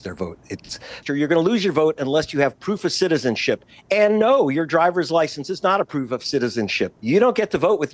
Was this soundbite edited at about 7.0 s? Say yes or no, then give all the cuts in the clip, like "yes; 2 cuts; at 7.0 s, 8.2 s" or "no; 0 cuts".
yes; 2 cuts; at 1.0 s, 7.0 s